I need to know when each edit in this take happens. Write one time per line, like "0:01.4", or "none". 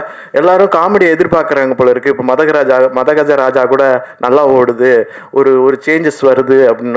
none

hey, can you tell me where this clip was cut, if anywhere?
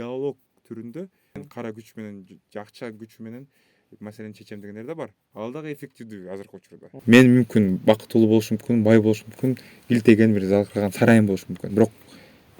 0:01.4
0:06.8
0:11.6

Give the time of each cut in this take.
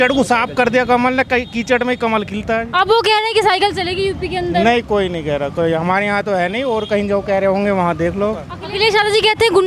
none

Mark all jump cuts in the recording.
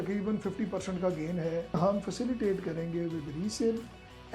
0:01.8

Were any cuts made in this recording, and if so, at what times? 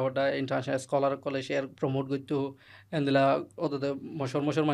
0:02.6

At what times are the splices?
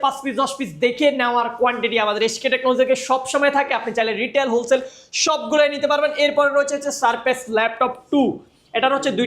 none

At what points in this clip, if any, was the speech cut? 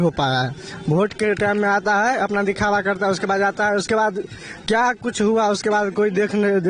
none

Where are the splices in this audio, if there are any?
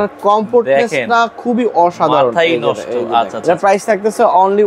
0:03.4

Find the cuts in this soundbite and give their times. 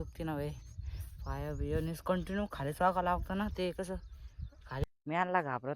0:04.8

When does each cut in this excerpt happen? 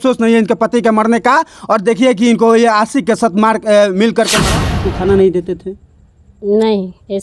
0:04.8

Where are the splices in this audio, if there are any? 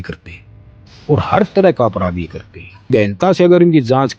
0:02.9

